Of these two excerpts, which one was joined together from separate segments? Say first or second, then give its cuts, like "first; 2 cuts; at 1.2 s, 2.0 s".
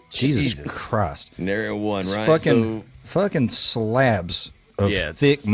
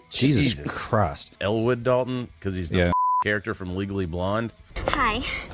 second; 1 cut; at 1.3 s